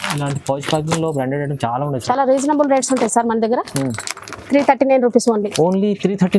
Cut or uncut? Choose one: cut